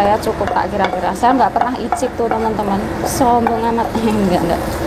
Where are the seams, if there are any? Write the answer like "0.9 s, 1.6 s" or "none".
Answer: none